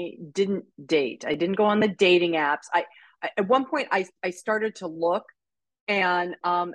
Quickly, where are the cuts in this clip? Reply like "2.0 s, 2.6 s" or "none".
none

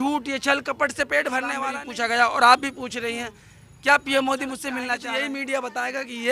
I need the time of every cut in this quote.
1.8 s, 4.9 s

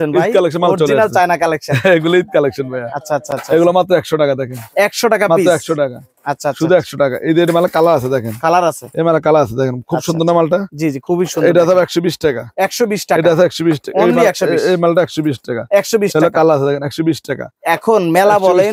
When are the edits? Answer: none

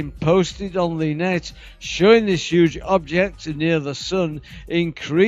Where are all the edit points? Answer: 3.6 s

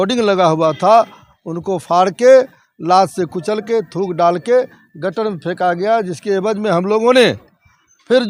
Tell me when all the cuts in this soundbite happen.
none

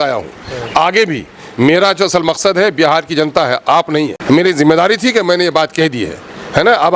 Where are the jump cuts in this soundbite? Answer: 4.2 s

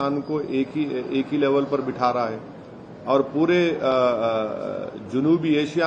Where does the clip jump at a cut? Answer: none

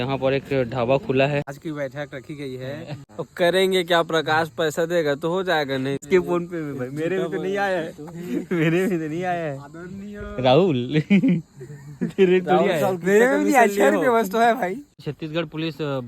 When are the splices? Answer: 1.6 s, 3.1 s, 6.0 s, 15.0 s

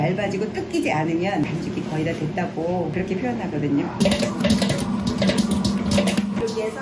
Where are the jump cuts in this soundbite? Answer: none

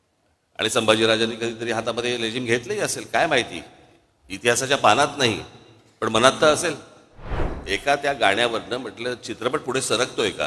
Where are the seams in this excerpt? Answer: 7.5 s

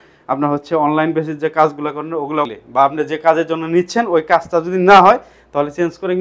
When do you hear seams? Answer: 2.6 s

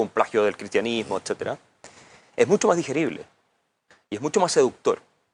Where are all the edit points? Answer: none

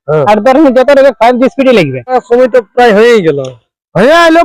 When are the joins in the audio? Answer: 2.2 s

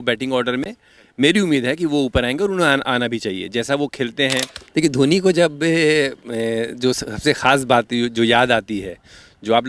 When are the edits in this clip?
4.6 s

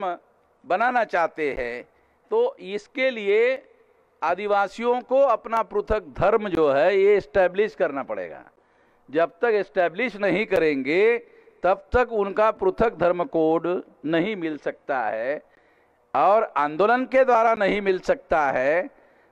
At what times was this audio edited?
none

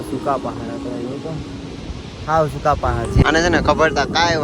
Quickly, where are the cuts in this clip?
3.2 s

